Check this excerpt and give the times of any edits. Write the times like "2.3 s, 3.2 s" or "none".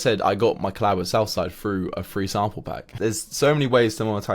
2.9 s